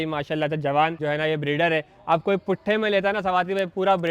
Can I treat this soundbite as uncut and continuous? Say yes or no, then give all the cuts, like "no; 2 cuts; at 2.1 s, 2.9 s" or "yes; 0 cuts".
no; 1 cut; at 1.0 s